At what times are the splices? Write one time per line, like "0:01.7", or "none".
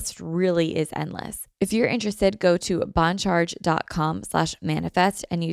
0:01.4